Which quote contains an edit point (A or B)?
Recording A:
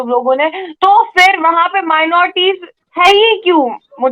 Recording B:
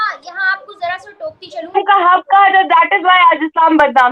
B